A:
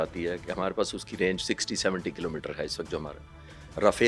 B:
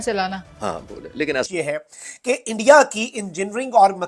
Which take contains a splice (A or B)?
B